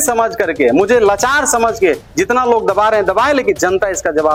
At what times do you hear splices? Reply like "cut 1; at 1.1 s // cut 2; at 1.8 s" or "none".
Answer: none

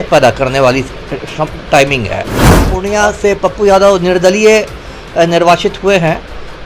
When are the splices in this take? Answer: cut 1; at 2.7 s

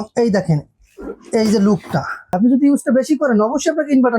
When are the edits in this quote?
cut 1; at 2.3 s

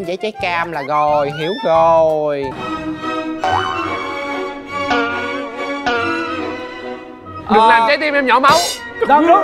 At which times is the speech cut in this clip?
cut 1; at 2.5 s

